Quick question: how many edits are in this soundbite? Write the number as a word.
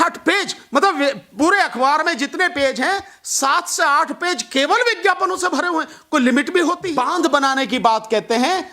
one